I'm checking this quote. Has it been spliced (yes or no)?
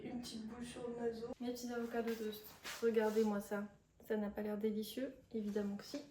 yes